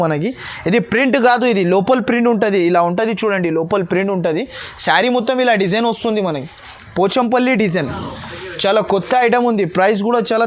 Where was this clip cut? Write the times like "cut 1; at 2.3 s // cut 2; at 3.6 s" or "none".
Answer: none